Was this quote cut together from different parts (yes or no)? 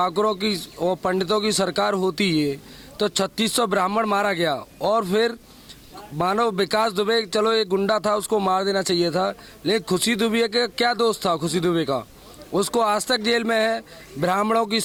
no